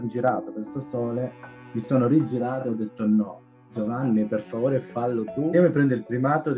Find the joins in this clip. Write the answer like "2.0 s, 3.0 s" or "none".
5.5 s